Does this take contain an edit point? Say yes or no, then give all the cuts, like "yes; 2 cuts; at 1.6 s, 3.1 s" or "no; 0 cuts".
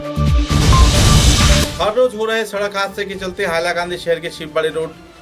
yes; 1 cut; at 1.7 s